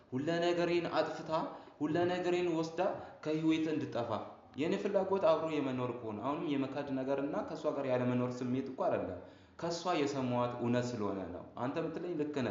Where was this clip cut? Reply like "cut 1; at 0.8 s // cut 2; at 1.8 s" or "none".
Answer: none

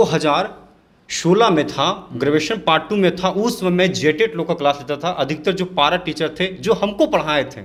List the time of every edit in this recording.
none

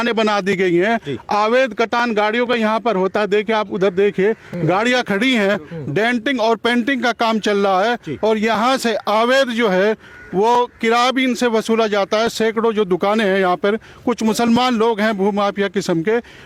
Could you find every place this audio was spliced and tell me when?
none

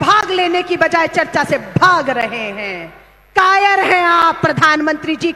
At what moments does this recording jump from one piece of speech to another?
none

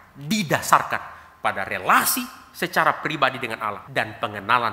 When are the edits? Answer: cut 1; at 3.8 s

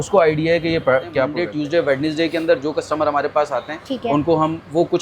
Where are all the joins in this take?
cut 1; at 1.4 s

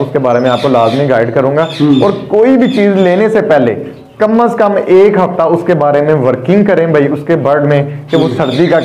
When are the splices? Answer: none

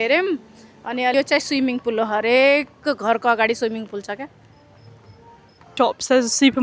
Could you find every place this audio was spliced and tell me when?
cut 1; at 1.1 s // cut 2; at 5.7 s

